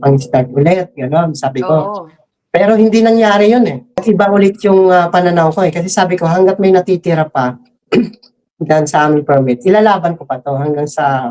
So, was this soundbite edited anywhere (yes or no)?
yes